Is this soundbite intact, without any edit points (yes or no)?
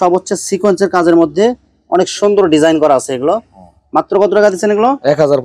yes